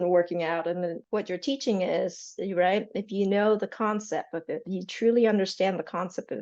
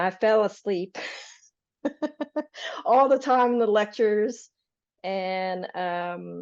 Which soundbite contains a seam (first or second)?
first